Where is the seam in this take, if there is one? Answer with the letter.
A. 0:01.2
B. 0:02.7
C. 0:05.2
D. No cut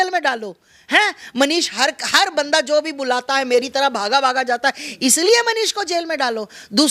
D